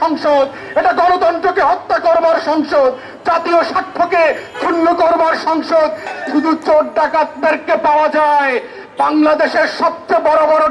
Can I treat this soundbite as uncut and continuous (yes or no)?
yes